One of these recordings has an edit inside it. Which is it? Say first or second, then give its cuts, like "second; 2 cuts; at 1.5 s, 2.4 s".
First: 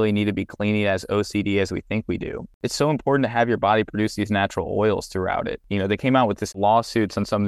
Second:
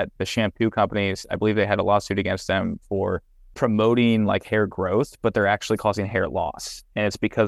first; 3 cuts; at 2.6 s, 5.6 s, 6.5 s